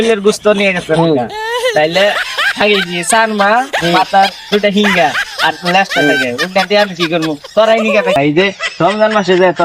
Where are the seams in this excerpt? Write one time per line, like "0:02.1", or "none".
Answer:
0:08.2